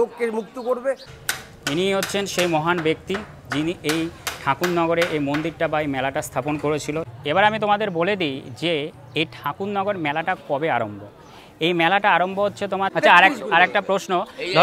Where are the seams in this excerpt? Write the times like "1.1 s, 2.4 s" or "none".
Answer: 1.1 s, 7.2 s, 12.9 s